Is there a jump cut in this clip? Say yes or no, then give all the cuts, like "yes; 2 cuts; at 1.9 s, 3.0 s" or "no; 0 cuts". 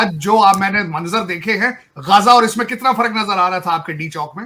no; 0 cuts